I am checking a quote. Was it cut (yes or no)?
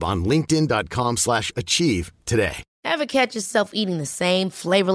yes